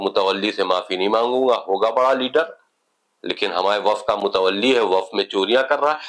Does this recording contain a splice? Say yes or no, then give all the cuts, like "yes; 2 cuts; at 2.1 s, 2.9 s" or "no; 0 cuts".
no; 0 cuts